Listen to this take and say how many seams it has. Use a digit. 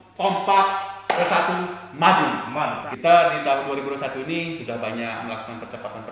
1